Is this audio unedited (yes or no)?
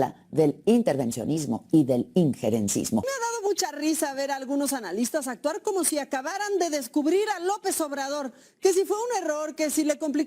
no